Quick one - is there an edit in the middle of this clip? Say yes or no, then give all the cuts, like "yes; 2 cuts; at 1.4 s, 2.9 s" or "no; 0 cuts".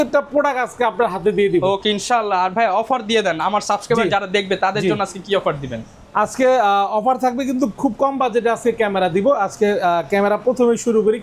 no; 0 cuts